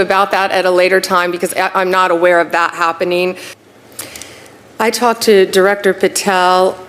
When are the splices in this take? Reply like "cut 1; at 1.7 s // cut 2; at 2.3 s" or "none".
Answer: cut 1; at 3.5 s